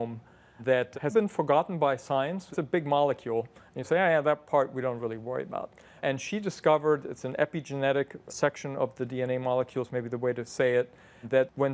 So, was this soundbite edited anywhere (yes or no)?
no